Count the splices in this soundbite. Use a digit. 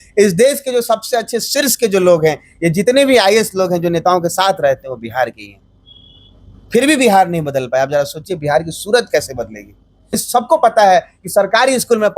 1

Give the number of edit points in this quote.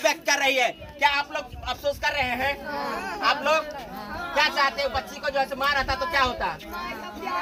0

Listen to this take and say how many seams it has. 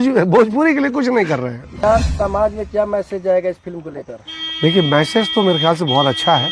1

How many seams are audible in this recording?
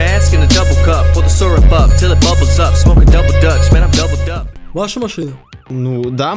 1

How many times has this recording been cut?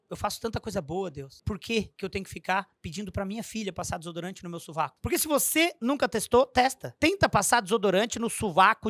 4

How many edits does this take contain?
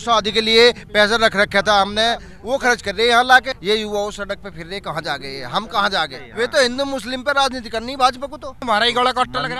4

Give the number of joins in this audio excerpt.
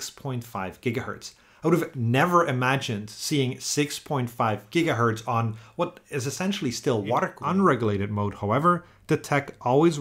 1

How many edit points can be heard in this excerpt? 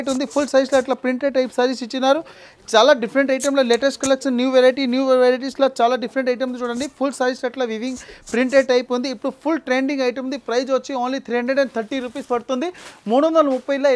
0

